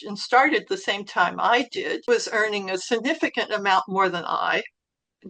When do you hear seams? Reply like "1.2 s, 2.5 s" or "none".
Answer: 2.1 s